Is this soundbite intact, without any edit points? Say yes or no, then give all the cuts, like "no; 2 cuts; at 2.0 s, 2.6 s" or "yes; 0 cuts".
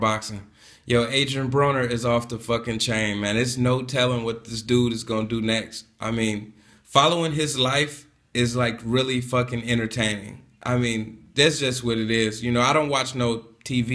no; 1 cut; at 5.0 s